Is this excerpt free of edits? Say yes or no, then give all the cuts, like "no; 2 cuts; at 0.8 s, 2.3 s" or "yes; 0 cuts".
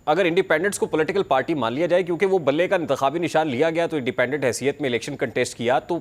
yes; 0 cuts